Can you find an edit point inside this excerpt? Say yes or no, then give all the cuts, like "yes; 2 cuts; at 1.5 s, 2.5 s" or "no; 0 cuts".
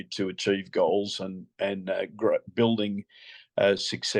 no; 0 cuts